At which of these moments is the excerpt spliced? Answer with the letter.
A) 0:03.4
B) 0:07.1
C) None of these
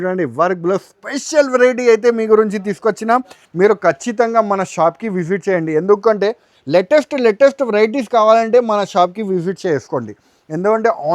A